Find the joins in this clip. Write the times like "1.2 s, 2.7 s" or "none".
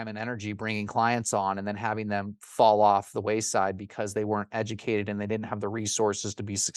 none